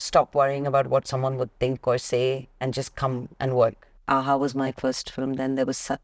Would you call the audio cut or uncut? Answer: cut